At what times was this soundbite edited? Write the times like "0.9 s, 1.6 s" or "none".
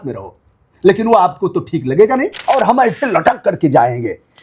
2.4 s